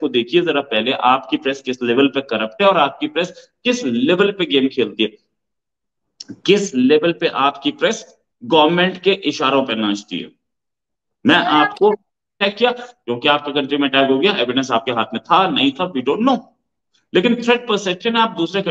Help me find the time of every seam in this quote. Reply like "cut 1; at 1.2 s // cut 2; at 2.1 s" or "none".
cut 1; at 12.4 s